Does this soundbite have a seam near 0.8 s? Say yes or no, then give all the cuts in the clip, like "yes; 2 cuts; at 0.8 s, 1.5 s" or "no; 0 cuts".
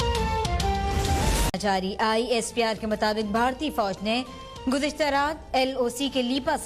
no; 0 cuts